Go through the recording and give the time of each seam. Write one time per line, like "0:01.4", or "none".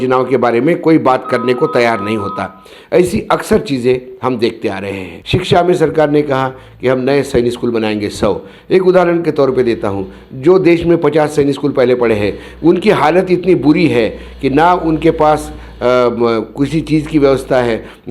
0:05.1

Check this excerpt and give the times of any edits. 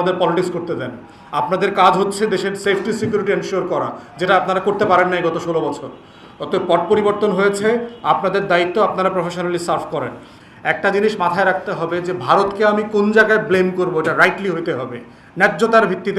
0:10.3

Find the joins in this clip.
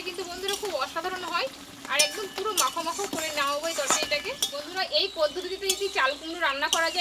0:04.6

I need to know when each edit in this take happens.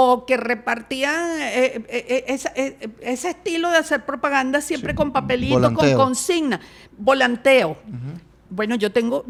none

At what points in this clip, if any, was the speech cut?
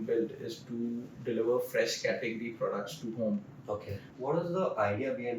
0:04.0

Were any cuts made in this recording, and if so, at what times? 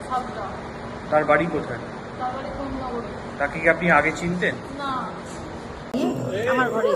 0:05.9

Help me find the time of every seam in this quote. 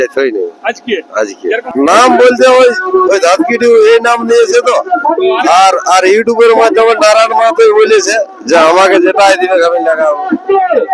0:01.7

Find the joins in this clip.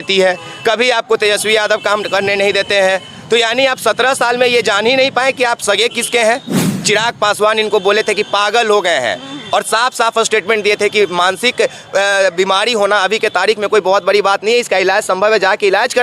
0:06.7

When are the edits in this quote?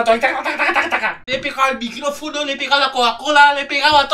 0:01.2

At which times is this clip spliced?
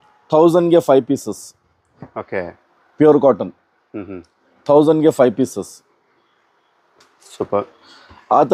none

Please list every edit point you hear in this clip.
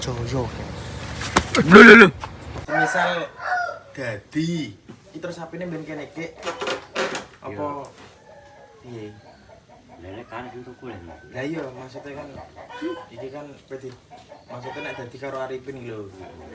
0:02.6

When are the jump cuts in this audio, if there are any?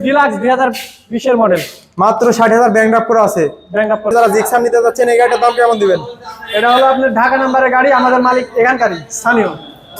0:04.1

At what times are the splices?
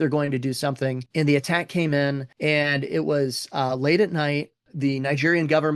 0:01.0
0:02.3

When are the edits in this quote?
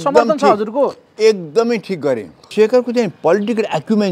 0:02.5

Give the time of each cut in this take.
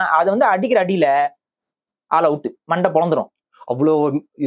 none

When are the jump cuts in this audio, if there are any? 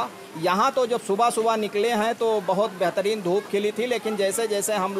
none

